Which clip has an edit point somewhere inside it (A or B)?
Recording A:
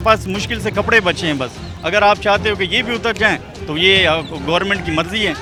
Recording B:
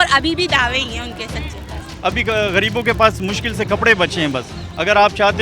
B